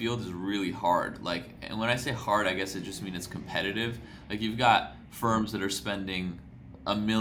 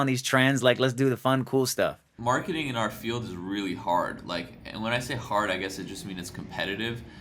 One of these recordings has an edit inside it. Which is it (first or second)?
second